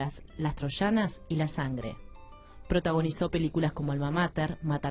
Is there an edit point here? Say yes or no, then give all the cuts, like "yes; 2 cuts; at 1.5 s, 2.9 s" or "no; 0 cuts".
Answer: no; 0 cuts